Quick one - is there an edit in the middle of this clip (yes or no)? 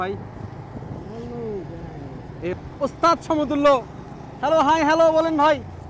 yes